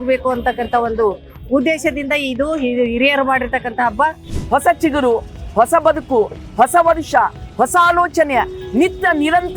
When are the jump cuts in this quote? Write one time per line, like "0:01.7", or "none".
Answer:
0:04.2